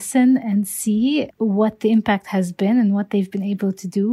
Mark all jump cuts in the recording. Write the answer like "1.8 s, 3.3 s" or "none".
1.3 s